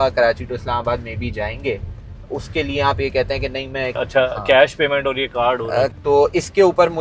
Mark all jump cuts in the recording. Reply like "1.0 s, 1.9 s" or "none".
3.9 s, 5.9 s